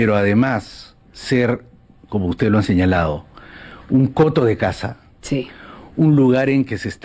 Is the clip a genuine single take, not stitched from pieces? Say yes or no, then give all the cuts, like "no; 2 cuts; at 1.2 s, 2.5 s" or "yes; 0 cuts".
yes; 0 cuts